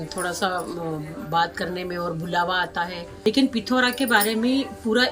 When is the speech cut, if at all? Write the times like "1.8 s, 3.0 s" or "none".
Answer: 3.0 s